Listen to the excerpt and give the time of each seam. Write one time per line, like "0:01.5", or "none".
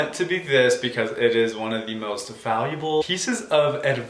0:03.0